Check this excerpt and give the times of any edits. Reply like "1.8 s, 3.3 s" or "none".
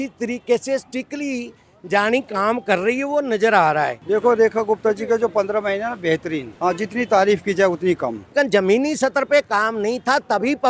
4.0 s, 6.5 s, 8.3 s